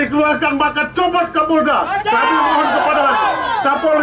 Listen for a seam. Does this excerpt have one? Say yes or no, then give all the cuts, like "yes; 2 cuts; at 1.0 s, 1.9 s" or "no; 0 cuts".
no; 0 cuts